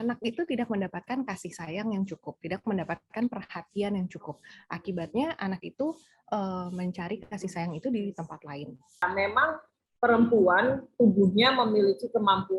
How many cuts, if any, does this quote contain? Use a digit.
1